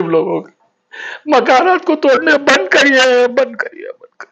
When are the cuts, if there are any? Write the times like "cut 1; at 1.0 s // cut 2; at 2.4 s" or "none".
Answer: none